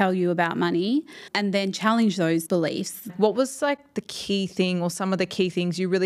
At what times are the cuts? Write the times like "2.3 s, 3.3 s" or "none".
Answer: 1.2 s, 2.7 s